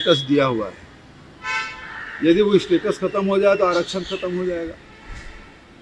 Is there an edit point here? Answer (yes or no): no